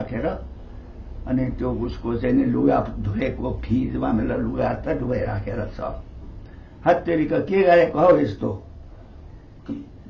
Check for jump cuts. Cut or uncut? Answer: uncut